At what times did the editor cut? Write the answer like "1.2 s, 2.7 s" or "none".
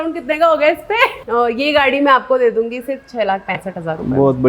1.2 s